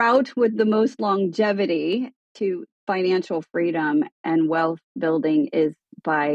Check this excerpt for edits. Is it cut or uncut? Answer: cut